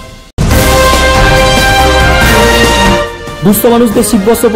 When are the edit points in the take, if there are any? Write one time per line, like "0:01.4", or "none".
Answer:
0:03.2